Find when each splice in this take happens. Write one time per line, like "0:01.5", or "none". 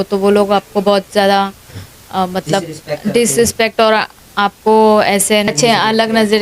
0:05.5